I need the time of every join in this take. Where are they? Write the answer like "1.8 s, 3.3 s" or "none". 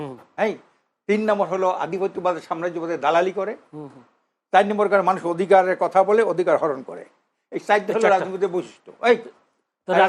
none